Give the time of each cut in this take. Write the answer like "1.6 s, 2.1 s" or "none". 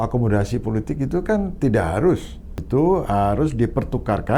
2.6 s